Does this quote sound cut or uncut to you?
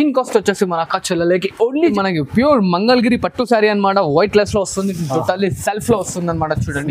cut